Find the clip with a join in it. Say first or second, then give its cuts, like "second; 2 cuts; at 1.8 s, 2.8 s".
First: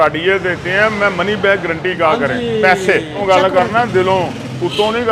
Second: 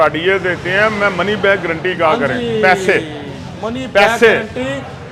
first; 1 cut; at 3.2 s